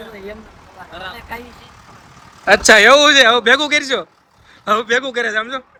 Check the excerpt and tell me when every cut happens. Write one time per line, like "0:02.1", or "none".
none

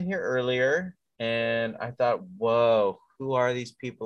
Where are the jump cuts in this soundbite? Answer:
0:01.0

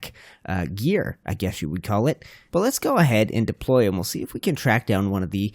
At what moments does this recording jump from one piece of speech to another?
0:02.3

